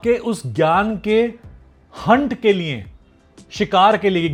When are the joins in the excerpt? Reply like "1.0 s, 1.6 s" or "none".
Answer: none